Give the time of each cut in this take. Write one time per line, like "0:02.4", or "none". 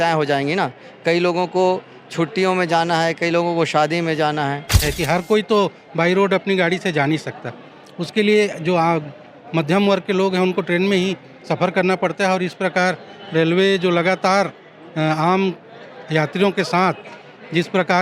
0:04.9